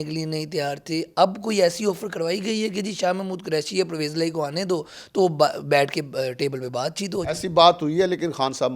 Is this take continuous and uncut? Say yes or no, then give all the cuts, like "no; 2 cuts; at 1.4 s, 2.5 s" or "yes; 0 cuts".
yes; 0 cuts